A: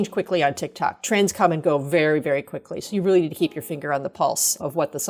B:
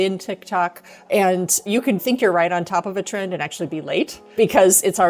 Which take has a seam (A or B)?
B